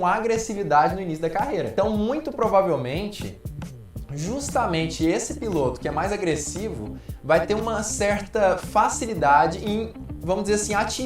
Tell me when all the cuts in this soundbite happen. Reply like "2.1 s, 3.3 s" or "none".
1.7 s